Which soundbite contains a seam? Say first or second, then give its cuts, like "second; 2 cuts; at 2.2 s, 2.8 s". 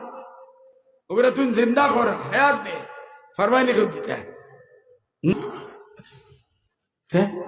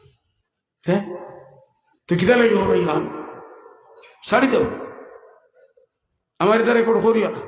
first; 1 cut; at 5.3 s